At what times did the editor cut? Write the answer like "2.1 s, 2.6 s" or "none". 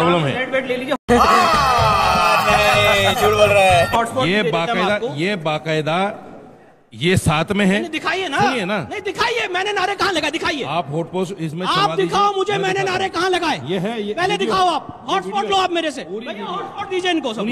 none